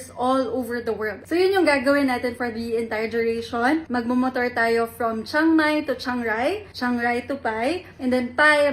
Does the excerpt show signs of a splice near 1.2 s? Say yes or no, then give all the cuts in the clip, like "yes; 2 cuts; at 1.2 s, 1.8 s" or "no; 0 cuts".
yes; 1 cut; at 1.2 s